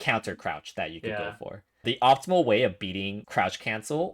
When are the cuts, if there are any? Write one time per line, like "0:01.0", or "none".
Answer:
0:01.8
0:03.2